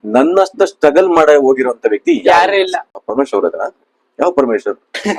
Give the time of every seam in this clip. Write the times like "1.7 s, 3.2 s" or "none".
3.0 s